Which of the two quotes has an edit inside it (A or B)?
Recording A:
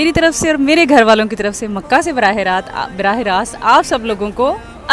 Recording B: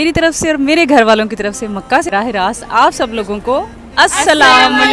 B